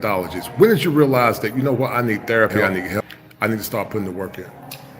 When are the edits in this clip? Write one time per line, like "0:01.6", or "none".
0:03.0